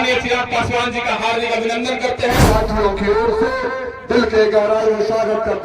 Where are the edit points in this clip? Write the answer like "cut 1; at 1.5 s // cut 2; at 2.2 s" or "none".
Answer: cut 1; at 2.4 s